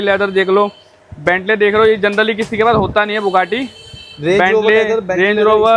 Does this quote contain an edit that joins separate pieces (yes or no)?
no